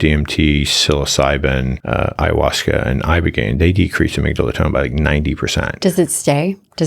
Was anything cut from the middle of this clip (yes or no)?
yes